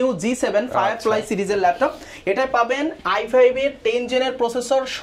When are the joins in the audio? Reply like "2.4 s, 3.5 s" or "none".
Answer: none